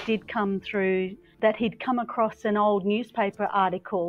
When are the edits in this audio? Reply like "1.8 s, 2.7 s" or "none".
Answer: 1.2 s